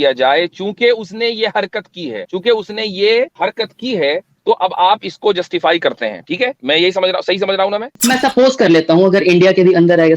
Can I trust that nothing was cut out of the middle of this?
no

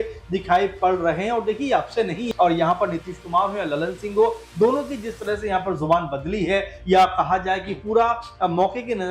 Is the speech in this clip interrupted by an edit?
yes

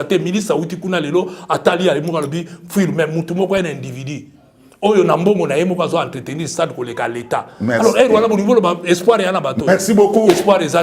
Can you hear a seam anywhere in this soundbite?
no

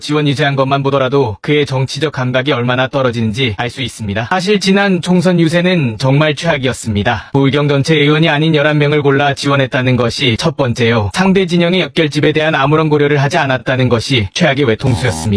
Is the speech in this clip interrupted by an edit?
no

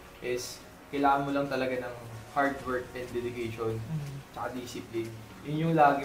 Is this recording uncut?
yes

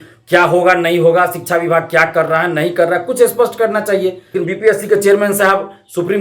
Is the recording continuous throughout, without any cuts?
no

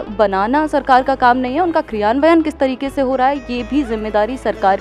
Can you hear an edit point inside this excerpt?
no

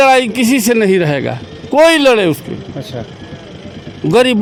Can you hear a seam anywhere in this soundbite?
no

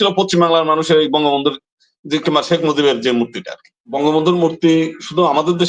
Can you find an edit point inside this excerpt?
yes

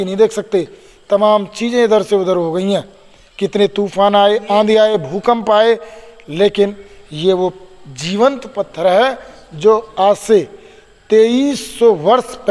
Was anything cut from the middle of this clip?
no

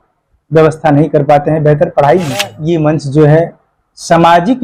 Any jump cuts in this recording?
yes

